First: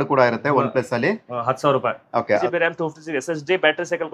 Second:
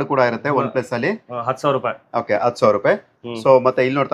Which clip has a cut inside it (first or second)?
first